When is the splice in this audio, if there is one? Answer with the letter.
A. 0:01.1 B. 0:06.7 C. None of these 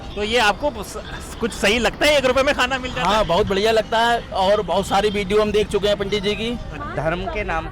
B